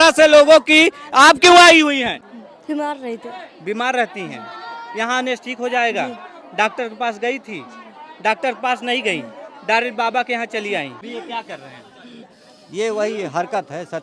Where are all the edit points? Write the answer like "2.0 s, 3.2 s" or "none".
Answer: 2.2 s, 11.0 s